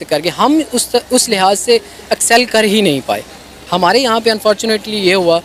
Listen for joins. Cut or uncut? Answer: cut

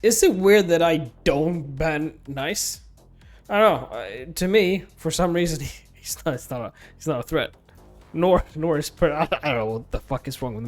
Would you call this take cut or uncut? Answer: uncut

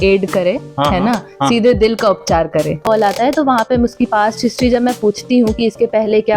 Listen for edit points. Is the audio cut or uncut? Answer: cut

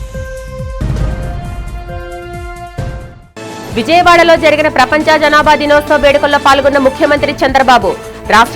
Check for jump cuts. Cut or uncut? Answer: cut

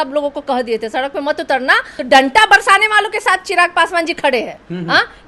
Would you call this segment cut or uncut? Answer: cut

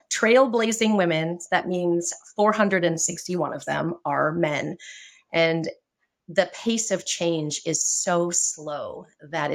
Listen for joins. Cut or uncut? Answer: uncut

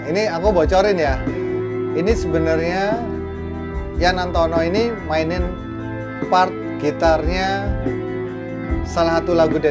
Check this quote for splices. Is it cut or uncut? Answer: uncut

